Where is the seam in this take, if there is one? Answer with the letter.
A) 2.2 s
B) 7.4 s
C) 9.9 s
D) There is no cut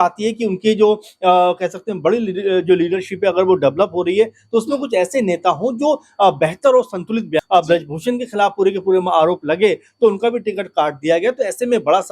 B